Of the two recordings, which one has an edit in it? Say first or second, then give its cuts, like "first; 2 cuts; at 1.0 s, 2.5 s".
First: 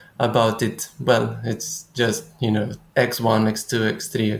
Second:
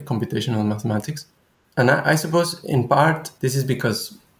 second; 1 cut; at 1.5 s